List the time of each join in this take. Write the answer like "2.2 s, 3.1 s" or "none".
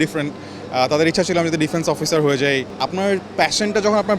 2.7 s